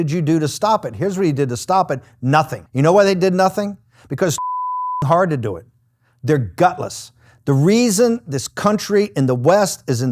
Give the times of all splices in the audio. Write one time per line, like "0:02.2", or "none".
0:02.6